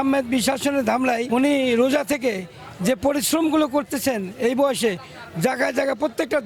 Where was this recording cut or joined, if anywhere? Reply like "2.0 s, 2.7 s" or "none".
1.2 s